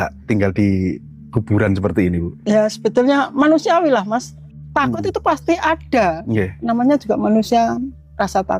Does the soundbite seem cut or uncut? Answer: uncut